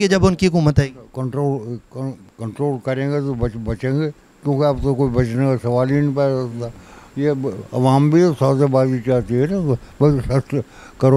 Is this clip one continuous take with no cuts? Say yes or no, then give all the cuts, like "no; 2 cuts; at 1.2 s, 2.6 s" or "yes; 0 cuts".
yes; 0 cuts